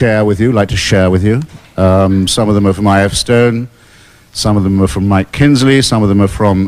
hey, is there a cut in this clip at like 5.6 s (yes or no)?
yes